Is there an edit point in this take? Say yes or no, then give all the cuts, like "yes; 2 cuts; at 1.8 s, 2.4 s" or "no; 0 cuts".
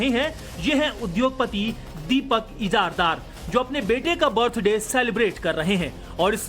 yes; 1 cut; at 3.0 s